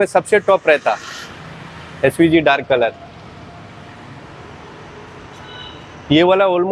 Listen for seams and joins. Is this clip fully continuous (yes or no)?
yes